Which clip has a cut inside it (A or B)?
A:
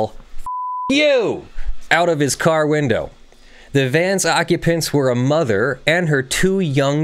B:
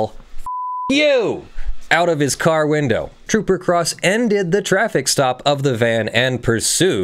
B